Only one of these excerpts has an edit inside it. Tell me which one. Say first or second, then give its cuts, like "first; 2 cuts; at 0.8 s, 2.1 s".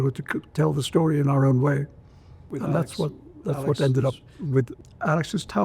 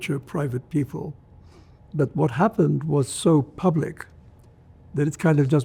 first; 1 cut; at 4.7 s